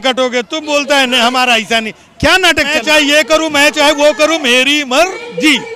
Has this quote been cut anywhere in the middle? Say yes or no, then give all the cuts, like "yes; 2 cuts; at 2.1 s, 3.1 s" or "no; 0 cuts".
yes; 1 cut; at 2.8 s